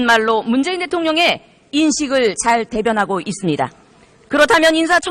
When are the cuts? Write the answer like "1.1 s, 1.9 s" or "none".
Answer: 3.9 s